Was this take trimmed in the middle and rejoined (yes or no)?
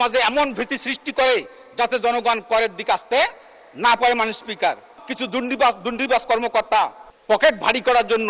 yes